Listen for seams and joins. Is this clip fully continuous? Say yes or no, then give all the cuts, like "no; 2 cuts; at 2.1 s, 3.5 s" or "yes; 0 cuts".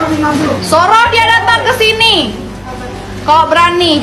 yes; 0 cuts